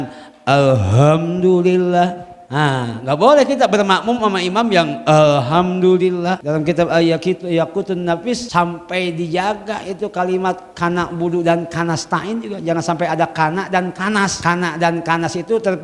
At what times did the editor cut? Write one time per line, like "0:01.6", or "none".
0:06.4
0:08.4
0:14.4